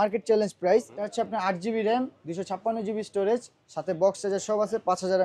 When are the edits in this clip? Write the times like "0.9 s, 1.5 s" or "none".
1.0 s